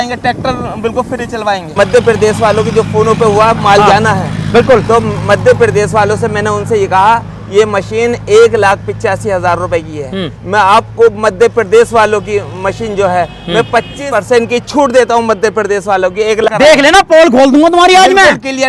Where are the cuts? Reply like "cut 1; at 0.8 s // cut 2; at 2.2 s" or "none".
cut 1; at 1.7 s // cut 2; at 13.9 s // cut 3; at 16.5 s